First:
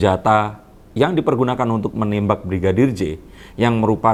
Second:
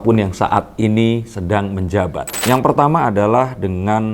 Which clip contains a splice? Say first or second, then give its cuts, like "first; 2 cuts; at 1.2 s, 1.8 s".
second; 1 cut; at 2.3 s